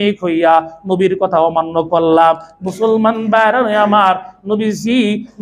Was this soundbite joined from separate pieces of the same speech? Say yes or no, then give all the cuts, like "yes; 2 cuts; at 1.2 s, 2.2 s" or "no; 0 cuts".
no; 0 cuts